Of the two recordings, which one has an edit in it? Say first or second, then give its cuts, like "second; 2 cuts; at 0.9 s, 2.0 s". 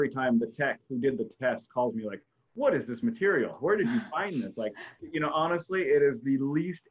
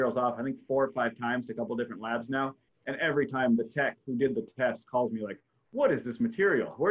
first; 1 cut; at 5.0 s